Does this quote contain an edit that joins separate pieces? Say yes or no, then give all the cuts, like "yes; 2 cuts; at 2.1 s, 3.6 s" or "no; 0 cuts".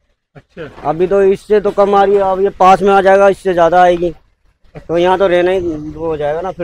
no; 0 cuts